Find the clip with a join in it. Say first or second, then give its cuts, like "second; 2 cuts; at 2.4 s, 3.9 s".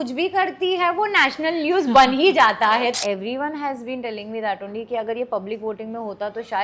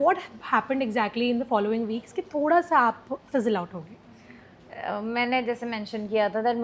first; 1 cut; at 2.9 s